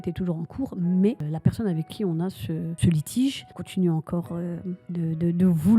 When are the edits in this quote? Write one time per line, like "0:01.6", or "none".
0:01.3
0:02.8
0:03.5
0:04.8